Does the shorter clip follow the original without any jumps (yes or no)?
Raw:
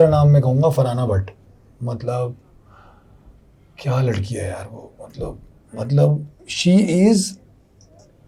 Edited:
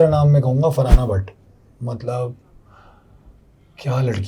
yes